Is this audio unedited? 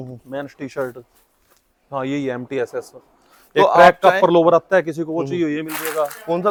yes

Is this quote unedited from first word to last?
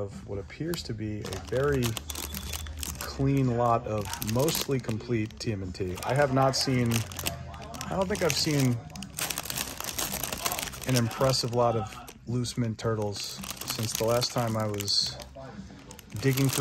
yes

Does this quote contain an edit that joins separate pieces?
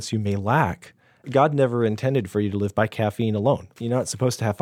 yes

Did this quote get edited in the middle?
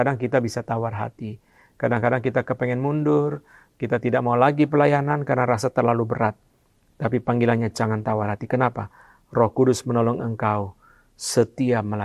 no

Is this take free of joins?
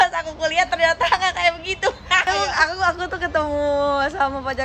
no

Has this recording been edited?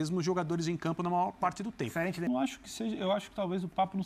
yes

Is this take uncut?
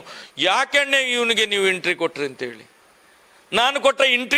yes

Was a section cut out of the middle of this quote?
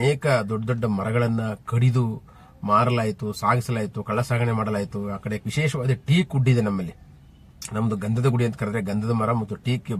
yes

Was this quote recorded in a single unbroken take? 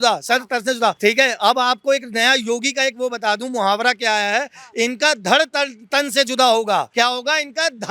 no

